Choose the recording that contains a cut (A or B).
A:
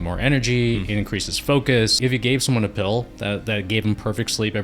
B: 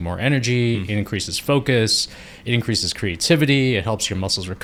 A